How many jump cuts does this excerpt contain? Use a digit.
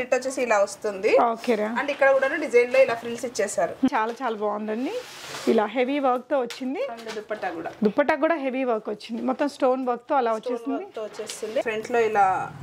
2